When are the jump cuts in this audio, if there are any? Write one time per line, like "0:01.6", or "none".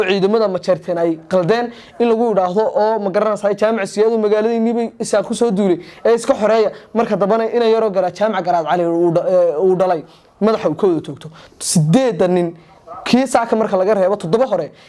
none